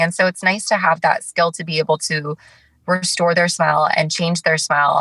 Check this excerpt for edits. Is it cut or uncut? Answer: uncut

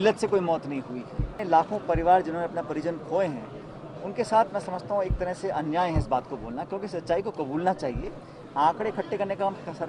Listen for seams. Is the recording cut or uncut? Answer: cut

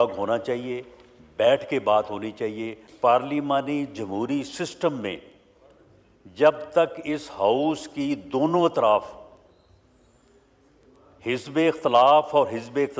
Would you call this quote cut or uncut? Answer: cut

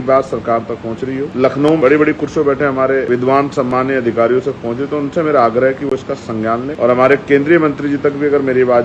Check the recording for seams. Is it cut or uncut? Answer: cut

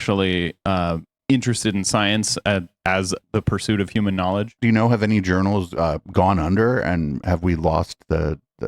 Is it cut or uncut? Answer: cut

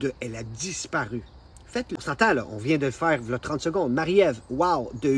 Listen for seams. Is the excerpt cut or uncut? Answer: cut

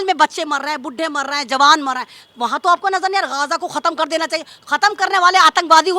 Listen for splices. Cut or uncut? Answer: uncut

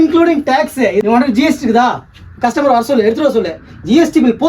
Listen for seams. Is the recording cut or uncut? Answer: cut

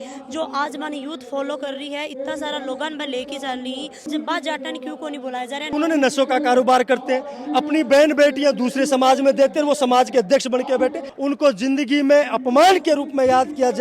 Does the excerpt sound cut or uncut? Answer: cut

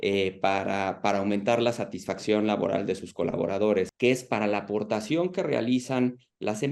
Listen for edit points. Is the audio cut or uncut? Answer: cut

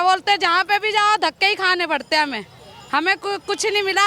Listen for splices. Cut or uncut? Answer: uncut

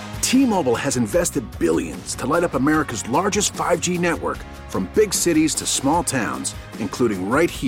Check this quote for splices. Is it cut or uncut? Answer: uncut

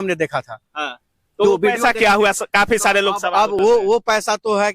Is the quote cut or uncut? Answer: uncut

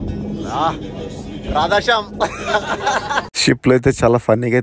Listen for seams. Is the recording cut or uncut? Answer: cut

